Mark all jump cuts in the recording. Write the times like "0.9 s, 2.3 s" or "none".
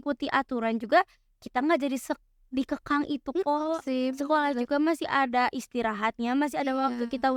none